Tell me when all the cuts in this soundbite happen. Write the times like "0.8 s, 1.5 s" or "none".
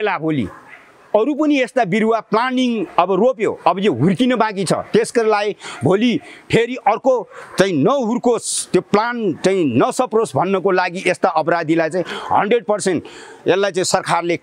none